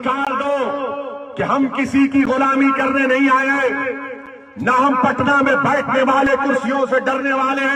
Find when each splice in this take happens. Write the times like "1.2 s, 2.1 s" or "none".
none